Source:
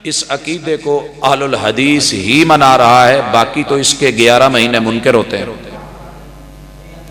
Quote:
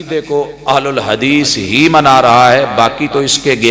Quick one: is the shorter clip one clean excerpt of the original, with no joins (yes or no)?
yes